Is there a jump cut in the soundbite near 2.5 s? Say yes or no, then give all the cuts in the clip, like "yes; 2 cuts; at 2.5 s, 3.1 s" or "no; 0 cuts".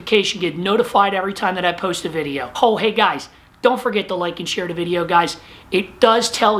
yes; 1 cut; at 2.5 s